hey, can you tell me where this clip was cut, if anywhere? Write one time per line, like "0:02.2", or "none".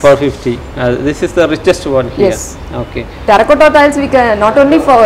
0:03.1